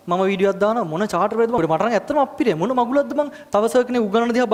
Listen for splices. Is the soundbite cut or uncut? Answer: uncut